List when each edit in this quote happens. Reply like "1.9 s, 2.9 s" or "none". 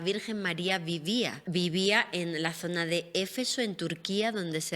1.4 s